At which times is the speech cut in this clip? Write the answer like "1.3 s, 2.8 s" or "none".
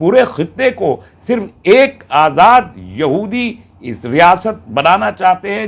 none